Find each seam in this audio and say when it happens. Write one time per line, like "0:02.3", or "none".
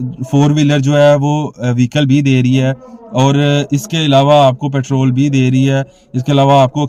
none